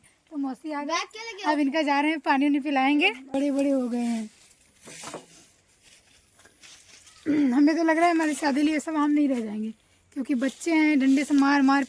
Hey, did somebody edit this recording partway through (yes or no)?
yes